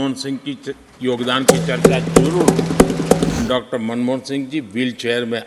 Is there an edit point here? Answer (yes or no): yes